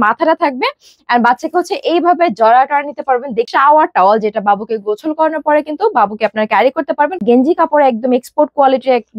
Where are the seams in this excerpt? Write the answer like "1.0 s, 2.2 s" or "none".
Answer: 3.5 s, 7.2 s